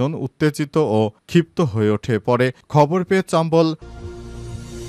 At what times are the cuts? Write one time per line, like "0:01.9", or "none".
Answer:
0:03.9